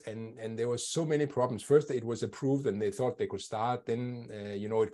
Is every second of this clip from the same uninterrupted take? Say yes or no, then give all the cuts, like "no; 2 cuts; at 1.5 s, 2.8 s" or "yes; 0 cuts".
yes; 0 cuts